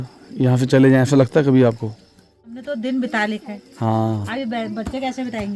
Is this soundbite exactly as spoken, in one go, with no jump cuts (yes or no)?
no